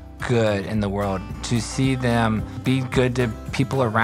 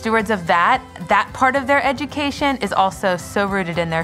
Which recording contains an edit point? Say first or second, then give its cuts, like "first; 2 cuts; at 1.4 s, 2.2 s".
first; 1 cut; at 2.5 s